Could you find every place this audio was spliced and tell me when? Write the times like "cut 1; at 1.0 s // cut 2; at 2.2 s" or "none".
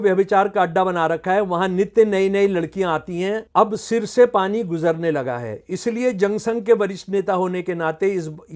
cut 1; at 3.4 s